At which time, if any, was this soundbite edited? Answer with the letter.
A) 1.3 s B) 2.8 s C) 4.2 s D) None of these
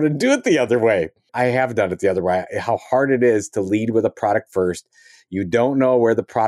A